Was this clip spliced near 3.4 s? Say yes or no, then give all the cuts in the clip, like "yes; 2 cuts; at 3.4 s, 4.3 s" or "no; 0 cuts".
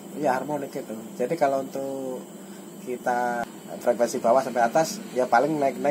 yes; 1 cut; at 3.4 s